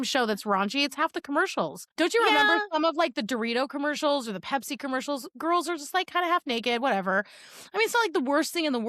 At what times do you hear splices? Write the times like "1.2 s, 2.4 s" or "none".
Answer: 1.8 s